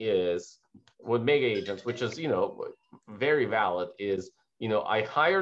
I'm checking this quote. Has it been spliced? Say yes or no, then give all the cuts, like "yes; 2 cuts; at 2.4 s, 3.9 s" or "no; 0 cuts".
no; 0 cuts